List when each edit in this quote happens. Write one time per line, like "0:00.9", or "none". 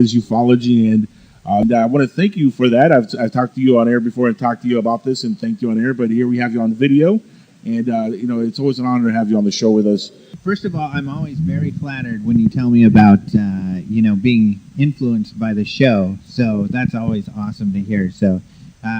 0:16.3